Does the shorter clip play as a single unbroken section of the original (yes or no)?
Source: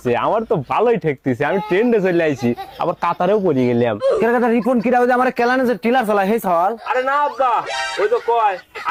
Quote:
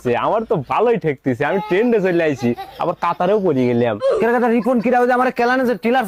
yes